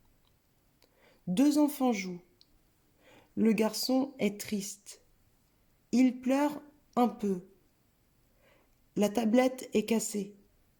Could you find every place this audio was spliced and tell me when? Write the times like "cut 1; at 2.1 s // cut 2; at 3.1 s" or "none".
none